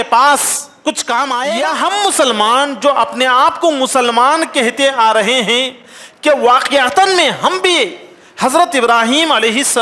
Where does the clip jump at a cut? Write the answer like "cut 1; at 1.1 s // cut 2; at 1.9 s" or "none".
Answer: cut 1; at 1.5 s